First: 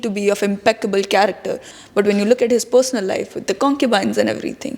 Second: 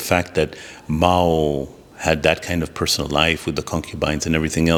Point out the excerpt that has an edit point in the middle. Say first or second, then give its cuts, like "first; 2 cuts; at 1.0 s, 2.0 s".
first; 1 cut; at 1.6 s